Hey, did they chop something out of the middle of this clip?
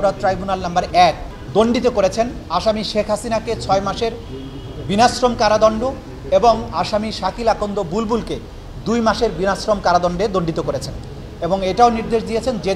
yes; 1 cut; at 1.3 s

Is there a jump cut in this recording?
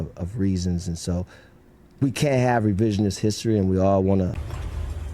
yes; 1 cut; at 4.2 s

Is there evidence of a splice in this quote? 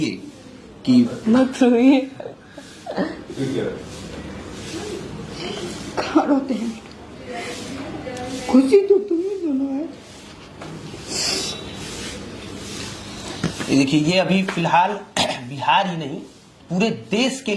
no; 0 cuts

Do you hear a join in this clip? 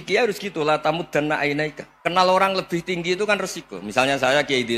yes; 1 cut; at 1.9 s

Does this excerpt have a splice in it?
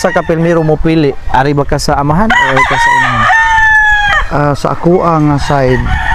no; 0 cuts

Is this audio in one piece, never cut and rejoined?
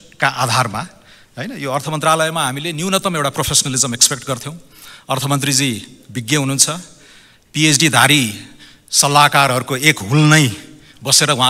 yes; 0 cuts

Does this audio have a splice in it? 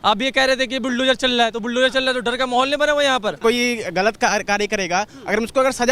yes; 1 cut; at 3.4 s

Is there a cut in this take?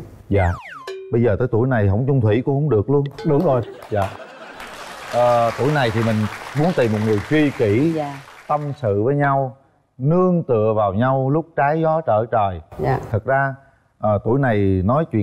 no; 0 cuts

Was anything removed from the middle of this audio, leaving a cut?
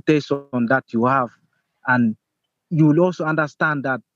no; 0 cuts

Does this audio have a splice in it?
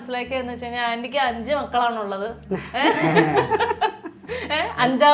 no; 0 cuts

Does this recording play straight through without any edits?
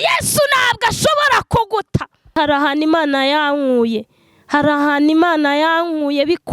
no; 1 cut; at 2.4 s

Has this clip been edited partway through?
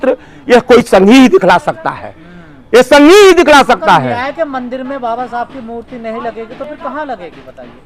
no; 0 cuts

